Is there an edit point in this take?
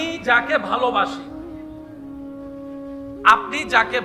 no; 0 cuts

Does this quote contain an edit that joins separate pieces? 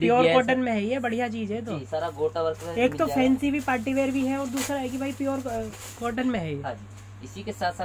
no; 0 cuts

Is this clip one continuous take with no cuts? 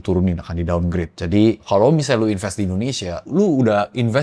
yes; 0 cuts

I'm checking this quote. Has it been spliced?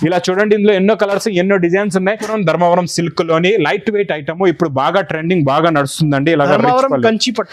yes; 1 cut; at 2.3 s

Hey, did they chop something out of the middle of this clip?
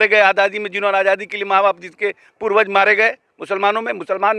no; 0 cuts

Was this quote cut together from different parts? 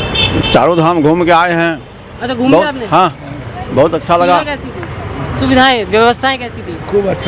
no; 0 cuts

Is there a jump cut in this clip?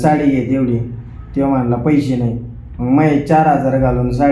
no; 0 cuts

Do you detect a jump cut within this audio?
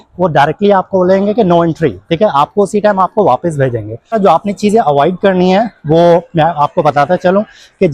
yes; 1 cut; at 4.1 s

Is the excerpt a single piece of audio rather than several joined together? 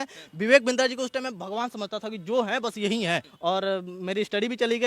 no; 1 cut; at 3.3 s

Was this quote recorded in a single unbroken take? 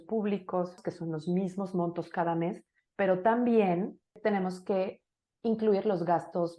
no; 3 cuts; at 0.8 s, 2.8 s, 4.2 s

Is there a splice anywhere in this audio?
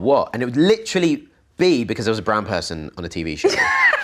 no; 0 cuts

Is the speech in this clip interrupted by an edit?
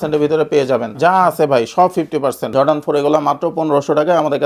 yes; 2 cuts; at 0.9 s, 2.4 s

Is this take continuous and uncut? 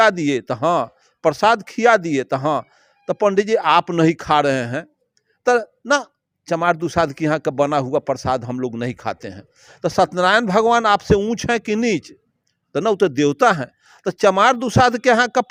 yes; 0 cuts

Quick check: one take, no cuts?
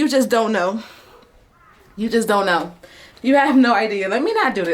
yes; 0 cuts

